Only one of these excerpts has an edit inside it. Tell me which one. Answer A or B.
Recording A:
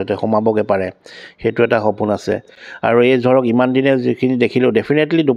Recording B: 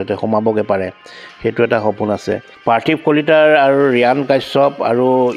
B